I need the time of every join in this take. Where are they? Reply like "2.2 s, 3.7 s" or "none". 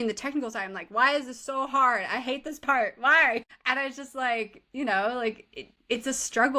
3.5 s